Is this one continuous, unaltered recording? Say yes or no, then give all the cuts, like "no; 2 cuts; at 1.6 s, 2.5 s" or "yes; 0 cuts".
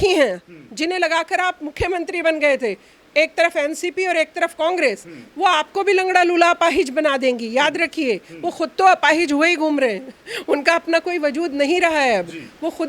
yes; 0 cuts